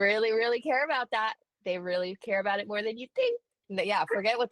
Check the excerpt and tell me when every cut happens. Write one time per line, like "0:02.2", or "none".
0:03.6